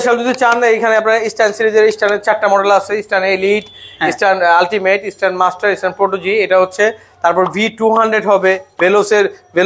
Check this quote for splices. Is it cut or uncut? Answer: uncut